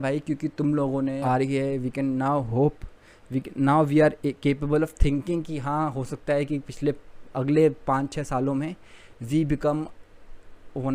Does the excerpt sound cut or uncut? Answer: cut